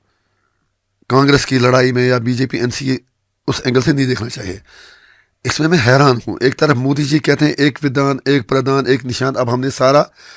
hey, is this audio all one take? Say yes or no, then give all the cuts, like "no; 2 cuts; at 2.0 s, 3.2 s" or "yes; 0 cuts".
yes; 0 cuts